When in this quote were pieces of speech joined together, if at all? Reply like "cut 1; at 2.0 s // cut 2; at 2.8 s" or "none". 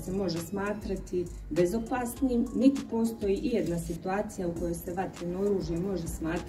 none